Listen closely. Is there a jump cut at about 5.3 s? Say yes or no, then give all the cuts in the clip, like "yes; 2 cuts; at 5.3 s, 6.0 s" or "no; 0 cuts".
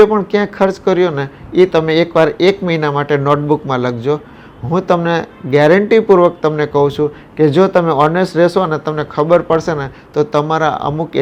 no; 0 cuts